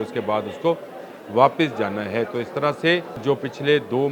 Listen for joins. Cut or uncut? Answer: cut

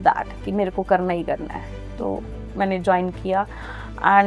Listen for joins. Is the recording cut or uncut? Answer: uncut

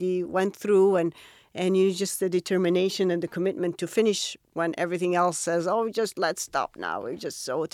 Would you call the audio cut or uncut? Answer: uncut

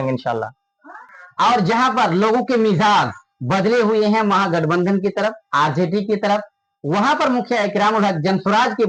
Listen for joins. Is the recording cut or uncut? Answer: uncut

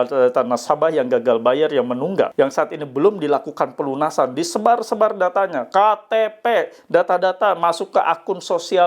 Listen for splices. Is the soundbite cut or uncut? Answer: cut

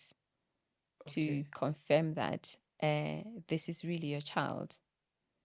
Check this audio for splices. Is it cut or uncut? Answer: uncut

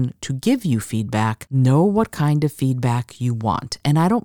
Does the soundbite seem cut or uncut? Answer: cut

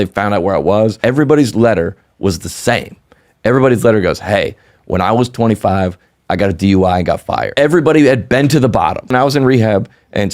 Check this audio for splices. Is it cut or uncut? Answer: cut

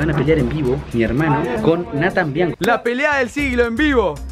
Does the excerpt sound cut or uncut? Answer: cut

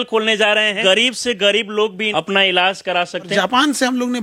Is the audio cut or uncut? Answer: cut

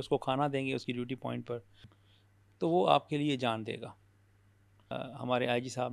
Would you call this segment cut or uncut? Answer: cut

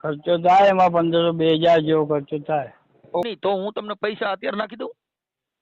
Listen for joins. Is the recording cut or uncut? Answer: cut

